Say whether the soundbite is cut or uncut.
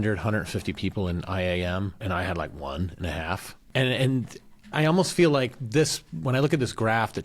cut